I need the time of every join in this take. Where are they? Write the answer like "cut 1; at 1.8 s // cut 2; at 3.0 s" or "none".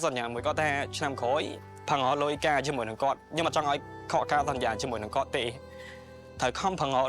cut 1; at 1.6 s